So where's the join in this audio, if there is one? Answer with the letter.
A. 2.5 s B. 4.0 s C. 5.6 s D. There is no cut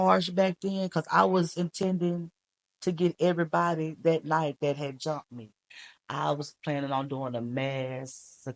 C